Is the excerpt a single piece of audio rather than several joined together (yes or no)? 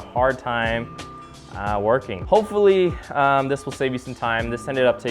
no